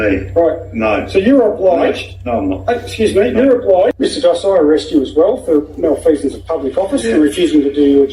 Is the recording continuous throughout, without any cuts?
no; 1 cut; at 4.0 s

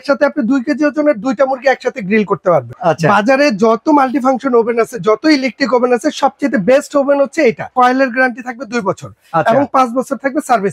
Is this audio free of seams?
no; 2 cuts; at 2.7 s, 7.7 s

